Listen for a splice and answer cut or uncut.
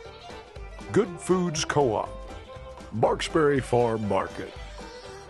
cut